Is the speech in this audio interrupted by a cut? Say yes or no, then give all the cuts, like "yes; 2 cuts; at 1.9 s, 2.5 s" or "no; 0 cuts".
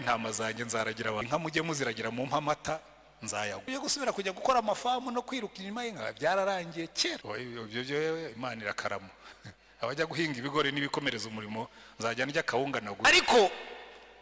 yes; 4 cuts; at 1.2 s, 3.7 s, 7.2 s, 13.0 s